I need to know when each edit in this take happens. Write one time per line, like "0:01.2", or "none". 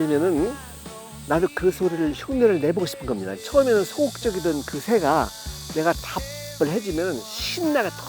0:03.4